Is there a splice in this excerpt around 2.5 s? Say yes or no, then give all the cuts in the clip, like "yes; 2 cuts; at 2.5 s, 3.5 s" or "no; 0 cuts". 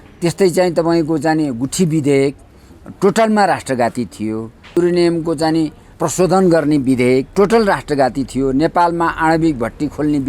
no; 3 cuts; at 4.8 s, 5.9 s, 7.3 s